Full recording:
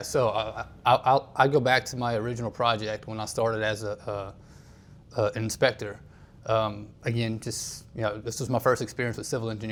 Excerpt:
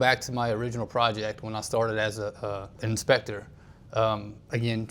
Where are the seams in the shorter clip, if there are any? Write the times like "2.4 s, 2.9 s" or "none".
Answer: 2.8 s